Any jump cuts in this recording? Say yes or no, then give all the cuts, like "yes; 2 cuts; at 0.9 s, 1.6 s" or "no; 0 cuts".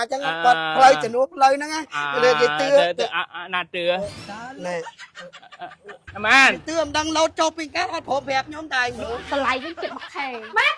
yes; 2 cuts; at 6.1 s, 9.2 s